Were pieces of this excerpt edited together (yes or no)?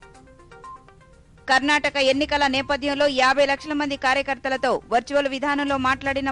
yes